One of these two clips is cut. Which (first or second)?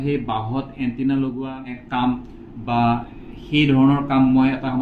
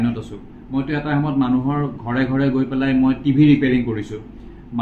first